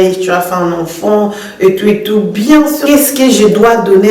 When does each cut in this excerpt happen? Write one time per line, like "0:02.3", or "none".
0:02.8